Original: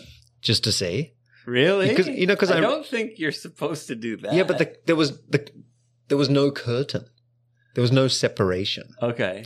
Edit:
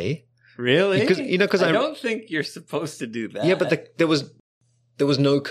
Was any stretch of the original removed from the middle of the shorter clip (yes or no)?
yes